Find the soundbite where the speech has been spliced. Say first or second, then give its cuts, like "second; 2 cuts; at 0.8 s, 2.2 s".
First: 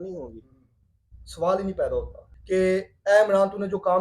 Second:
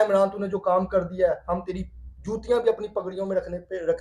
first; 1 cut; at 2.3 s